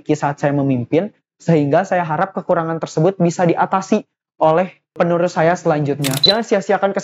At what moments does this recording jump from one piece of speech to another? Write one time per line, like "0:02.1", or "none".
0:04.9
0:06.3